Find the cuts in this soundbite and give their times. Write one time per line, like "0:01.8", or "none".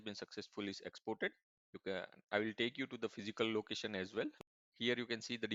none